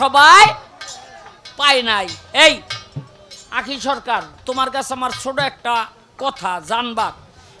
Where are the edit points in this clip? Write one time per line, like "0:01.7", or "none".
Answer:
none